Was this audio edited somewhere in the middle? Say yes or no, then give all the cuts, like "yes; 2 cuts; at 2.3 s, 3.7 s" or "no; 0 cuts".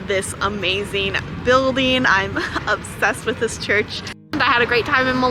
yes; 1 cut; at 4.3 s